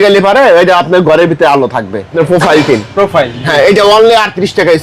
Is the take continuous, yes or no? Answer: no